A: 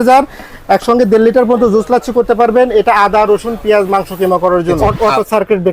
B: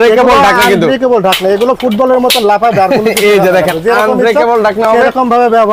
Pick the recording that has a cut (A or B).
A